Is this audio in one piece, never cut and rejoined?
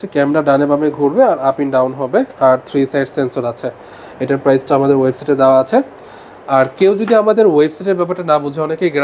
yes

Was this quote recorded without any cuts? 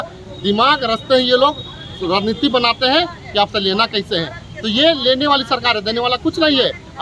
yes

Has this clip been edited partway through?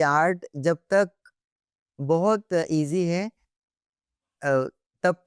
no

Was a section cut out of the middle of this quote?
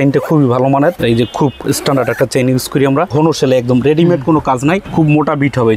yes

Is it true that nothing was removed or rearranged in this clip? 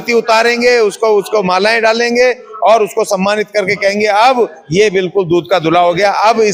yes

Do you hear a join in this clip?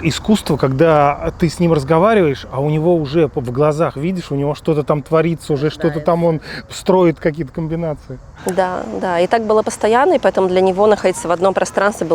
no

